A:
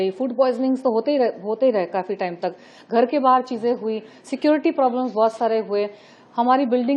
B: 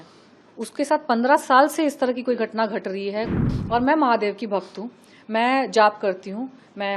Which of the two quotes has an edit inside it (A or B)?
B